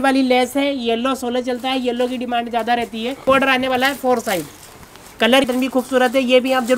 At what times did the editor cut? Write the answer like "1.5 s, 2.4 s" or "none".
3.2 s, 5.4 s